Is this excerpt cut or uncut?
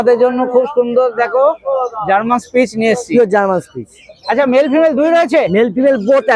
uncut